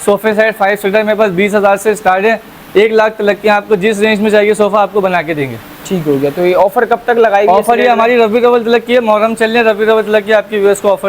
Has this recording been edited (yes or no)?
no